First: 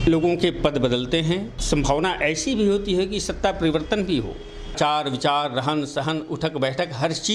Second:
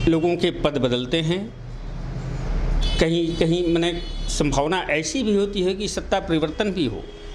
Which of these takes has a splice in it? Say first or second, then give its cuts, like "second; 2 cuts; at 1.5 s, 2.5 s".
first; 2 cuts; at 1.5 s, 4.7 s